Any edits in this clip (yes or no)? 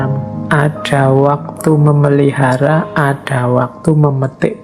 no